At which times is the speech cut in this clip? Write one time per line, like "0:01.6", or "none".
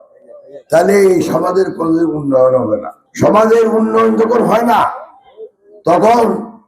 0:03.0